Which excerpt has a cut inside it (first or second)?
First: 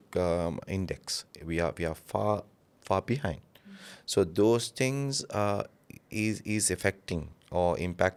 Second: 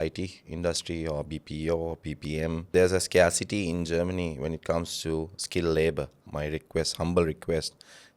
second